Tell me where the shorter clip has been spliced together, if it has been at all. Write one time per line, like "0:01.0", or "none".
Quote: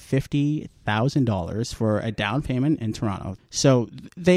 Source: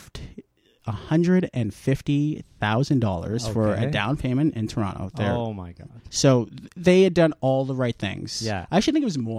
0:03.3

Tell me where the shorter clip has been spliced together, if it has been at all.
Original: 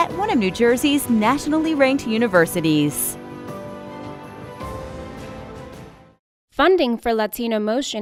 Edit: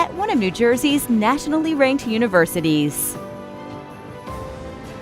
0:02.9

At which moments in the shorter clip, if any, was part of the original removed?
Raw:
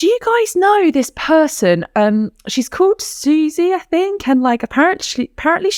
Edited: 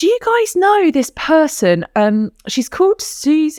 none

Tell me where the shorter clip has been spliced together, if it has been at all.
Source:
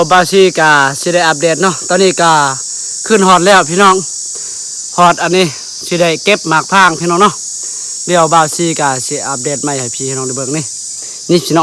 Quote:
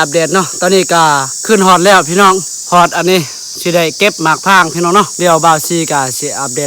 0:01.3
0:02.5
0:05.1

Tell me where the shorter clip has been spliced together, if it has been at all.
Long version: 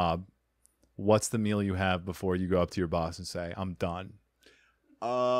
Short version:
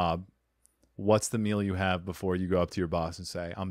none

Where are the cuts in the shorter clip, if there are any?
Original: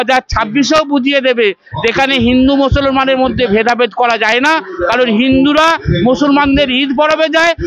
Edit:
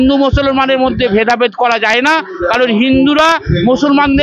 none

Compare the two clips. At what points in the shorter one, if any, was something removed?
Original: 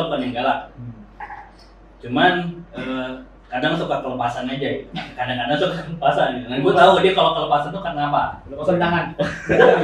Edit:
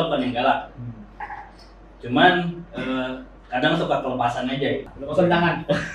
0:05.0

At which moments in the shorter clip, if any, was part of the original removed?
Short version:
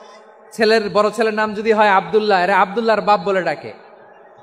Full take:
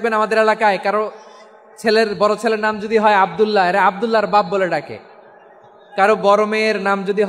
none

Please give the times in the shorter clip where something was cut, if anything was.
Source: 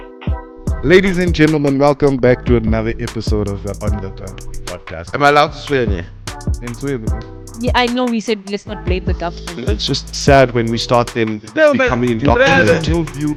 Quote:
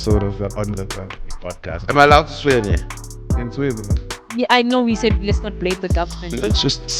none

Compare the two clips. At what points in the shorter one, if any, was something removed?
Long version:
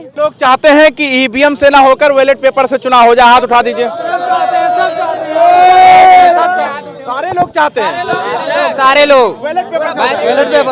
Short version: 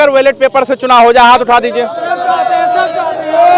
none

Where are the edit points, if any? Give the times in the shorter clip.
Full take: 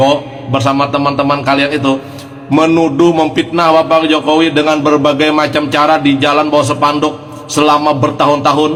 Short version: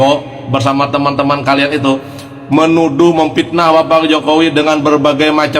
none

